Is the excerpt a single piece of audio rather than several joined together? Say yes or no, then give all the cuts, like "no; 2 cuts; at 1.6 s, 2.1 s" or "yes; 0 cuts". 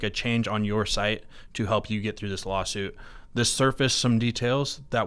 yes; 0 cuts